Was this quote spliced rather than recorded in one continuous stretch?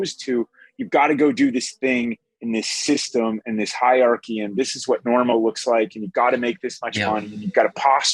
no; 0 cuts

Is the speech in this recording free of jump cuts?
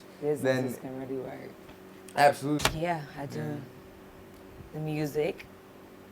no; 1 cut; at 2.6 s

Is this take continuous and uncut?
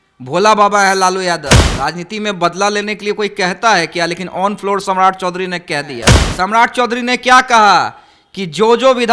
no; 2 cuts; at 1.6 s, 6.2 s

